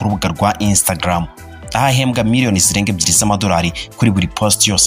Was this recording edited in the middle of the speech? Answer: no; 0 cuts

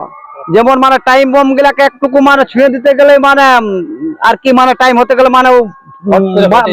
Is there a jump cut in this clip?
no; 0 cuts

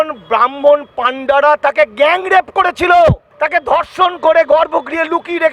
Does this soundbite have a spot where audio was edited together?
no; 0 cuts

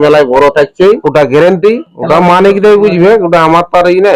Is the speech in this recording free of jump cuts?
no; 2 cuts; at 1.0 s, 1.9 s

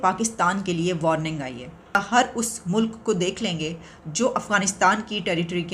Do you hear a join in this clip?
yes; 1 cut; at 2.0 s

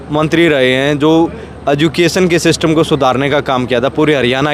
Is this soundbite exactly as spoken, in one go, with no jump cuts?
yes; 0 cuts

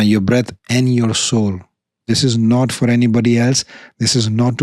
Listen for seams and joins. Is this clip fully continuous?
no; 1 cut; at 2.0 s

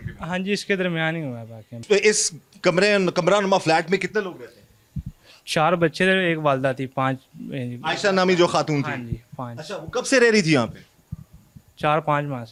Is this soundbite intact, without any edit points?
yes; 0 cuts

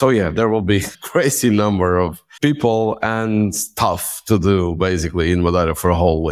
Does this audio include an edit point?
yes; 2 cuts; at 1.0 s, 2.2 s

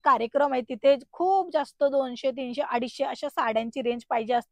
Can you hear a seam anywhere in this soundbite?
no; 0 cuts

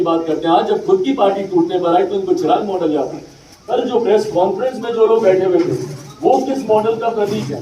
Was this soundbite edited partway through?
yes; 1 cut; at 3.7 s

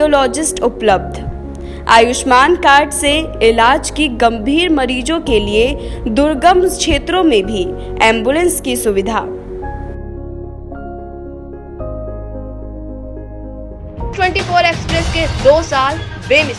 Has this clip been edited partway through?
yes; 1 cut; at 14.1 s

